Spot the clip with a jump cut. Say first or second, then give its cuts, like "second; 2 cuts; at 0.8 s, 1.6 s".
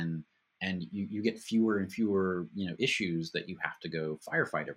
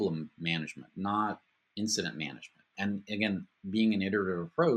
second; 1 cut; at 2.7 s